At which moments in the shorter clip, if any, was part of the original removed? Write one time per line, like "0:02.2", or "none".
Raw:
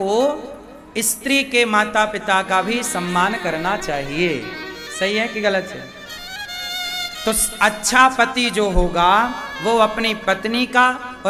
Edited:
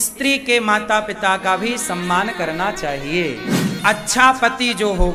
0:03.7